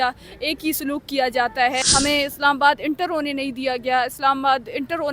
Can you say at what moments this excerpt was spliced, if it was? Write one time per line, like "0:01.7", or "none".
0:01.8